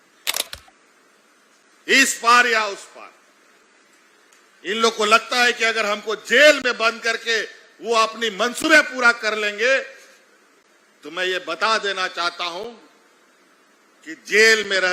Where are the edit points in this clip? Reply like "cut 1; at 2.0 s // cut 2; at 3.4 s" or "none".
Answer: none